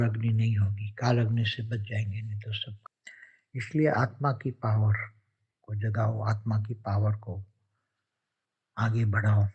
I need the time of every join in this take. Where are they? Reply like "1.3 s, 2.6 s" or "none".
2.8 s